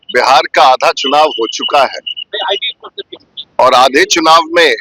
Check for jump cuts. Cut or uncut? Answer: uncut